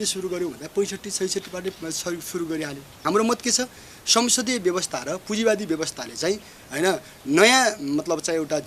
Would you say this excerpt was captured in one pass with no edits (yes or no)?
no